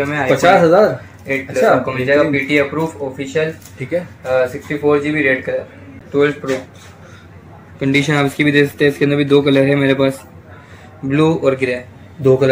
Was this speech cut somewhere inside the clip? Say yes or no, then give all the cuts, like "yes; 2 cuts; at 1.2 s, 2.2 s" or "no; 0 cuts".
yes; 1 cut; at 5.9 s